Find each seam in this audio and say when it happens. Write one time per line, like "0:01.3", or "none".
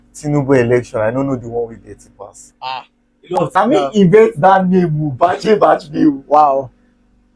0:03.5

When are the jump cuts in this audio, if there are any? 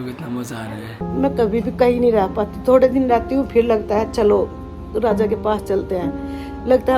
0:01.0

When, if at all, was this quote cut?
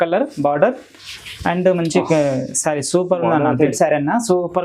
0:03.7

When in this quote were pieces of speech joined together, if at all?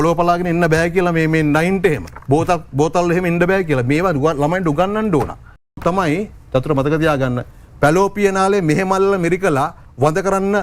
0:02.1
0:05.8

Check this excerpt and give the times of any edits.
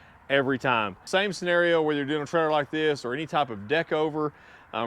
0:01.0

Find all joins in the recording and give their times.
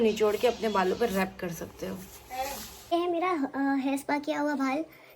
0:02.7

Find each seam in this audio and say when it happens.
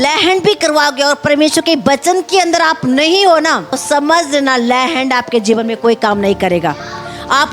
0:03.8

